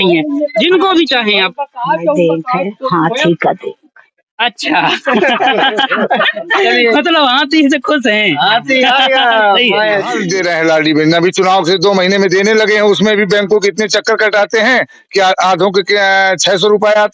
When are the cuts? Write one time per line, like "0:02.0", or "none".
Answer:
0:10.2